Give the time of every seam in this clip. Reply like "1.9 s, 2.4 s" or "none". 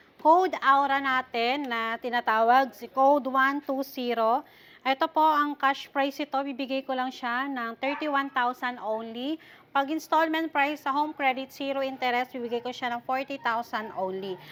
none

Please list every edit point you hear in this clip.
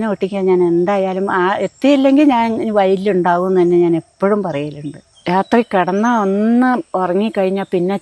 5.1 s

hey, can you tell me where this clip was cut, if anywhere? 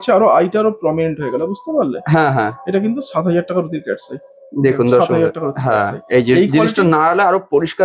none

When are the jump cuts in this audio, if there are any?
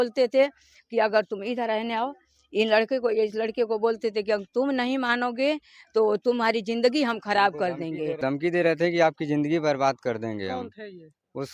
8.2 s

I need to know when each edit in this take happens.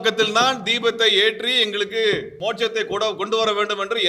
2.3 s

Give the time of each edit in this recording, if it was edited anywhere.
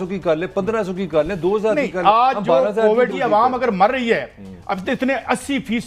3.1 s

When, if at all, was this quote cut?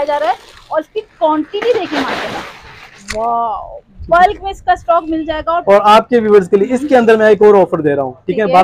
5.6 s

